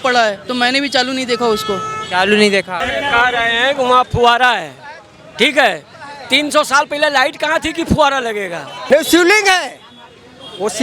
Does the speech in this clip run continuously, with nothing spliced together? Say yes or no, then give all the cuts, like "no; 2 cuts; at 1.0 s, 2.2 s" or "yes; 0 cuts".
no; 2 cuts; at 2.8 s, 8.7 s